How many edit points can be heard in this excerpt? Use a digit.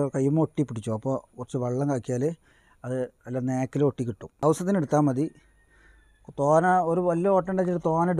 1